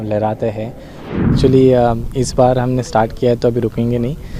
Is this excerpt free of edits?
no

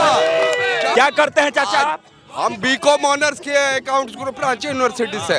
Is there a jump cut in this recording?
no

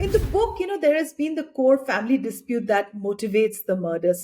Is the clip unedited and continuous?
yes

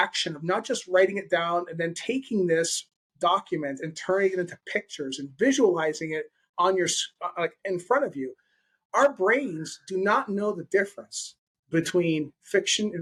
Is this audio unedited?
yes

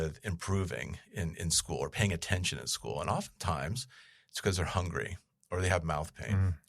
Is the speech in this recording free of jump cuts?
yes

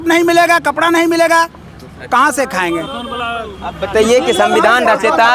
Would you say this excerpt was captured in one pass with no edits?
yes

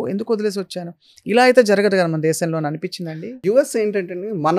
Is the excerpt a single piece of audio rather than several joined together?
no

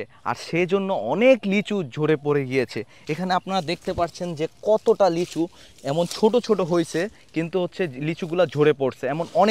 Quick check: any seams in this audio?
no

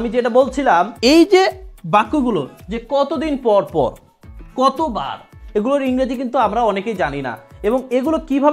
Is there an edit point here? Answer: yes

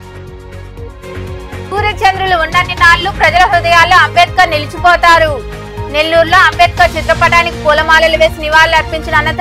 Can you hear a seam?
no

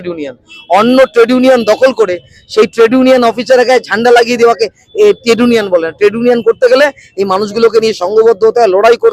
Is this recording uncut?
yes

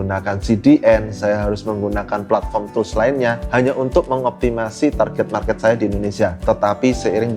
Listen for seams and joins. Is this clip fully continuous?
no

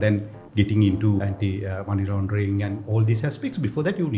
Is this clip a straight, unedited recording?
no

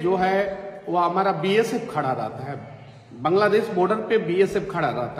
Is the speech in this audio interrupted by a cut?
no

